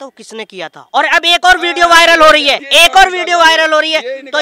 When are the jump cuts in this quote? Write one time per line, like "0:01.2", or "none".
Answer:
0:02.6